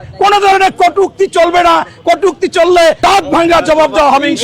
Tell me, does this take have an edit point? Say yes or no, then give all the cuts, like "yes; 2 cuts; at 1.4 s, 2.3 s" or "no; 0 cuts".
yes; 1 cut; at 3.0 s